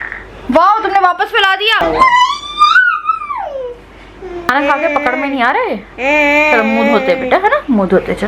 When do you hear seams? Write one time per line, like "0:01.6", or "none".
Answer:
0:01.8
0:04.5